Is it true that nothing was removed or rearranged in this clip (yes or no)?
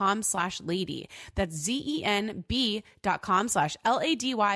yes